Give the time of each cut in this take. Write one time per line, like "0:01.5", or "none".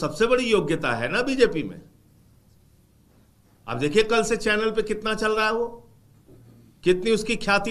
none